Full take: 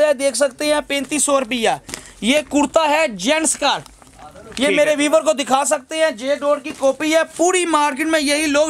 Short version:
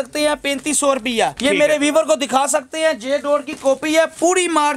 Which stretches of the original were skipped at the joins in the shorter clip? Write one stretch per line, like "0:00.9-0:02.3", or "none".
0:01.8-0:04.5